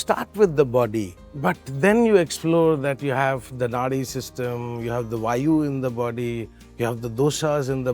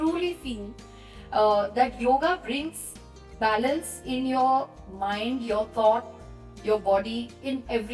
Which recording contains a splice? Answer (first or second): first